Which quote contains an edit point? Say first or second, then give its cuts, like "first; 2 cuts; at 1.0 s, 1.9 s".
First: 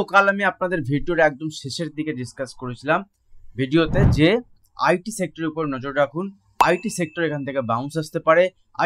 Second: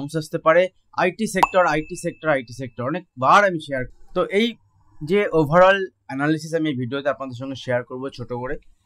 second; 1 cut; at 3.9 s